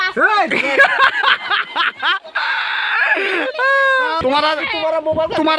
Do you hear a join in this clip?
yes; 1 cut; at 4.2 s

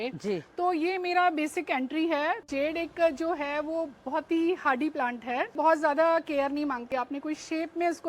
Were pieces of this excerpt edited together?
yes; 3 cuts; at 2.5 s, 5.5 s, 6.9 s

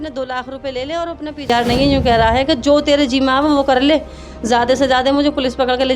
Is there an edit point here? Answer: yes; 1 cut; at 1.5 s

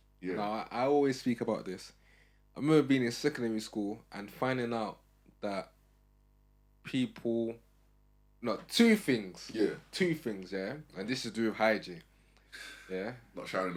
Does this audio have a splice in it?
no; 0 cuts

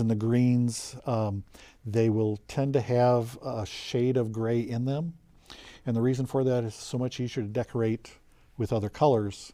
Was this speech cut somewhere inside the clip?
no; 0 cuts

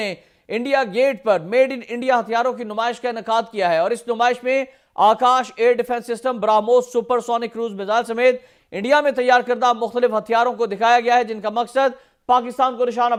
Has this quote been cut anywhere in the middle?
no; 0 cuts

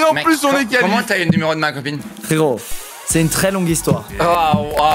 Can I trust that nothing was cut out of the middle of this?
yes; 0 cuts

